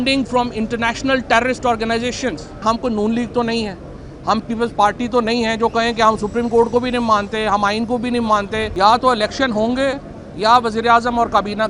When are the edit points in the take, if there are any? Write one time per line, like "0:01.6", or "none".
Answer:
0:02.6
0:08.7